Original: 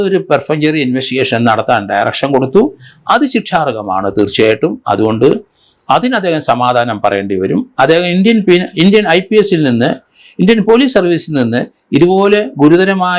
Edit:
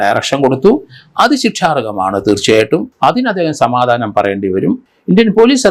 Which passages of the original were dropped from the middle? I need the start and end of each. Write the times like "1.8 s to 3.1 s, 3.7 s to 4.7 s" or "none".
4.8 s to 5.8 s, 7.7 s to 10.1 s